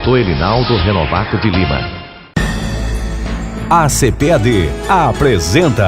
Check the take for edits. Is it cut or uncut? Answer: cut